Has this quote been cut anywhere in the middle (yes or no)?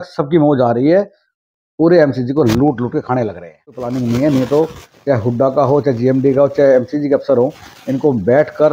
yes